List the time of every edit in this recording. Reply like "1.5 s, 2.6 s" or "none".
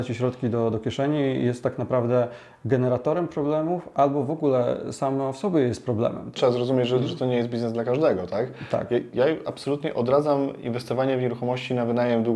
6.3 s